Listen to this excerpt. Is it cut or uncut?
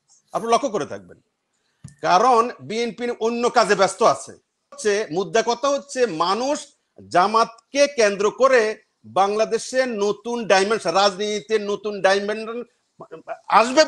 cut